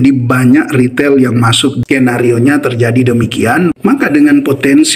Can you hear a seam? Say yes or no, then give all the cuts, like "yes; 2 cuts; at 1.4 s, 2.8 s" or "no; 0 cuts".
yes; 1 cut; at 1.8 s